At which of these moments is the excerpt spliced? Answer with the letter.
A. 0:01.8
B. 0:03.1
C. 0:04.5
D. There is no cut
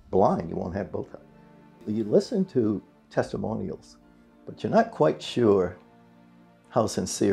A